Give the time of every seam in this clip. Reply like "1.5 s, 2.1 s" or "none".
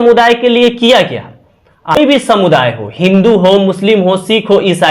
2.0 s